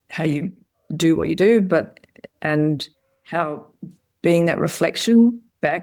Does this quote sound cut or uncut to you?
uncut